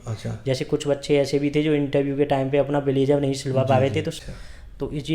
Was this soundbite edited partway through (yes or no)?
yes